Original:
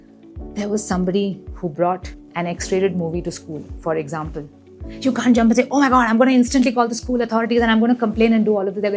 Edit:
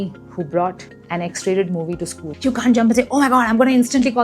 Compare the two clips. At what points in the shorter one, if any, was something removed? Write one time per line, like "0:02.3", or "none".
0:02.2